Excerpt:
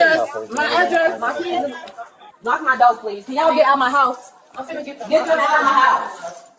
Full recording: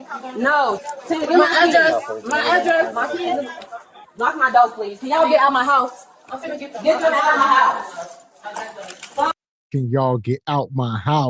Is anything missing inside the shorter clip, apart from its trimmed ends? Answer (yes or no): no